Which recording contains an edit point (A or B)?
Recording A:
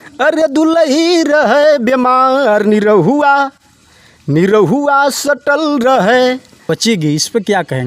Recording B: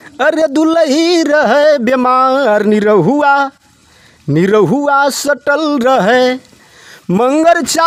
A